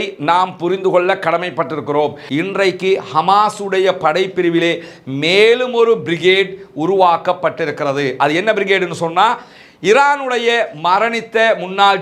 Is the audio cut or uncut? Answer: cut